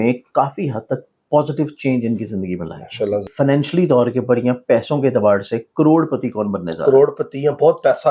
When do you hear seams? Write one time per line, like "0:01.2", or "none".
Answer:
0:03.3